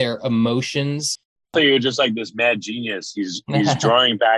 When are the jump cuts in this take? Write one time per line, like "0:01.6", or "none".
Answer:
0:01.1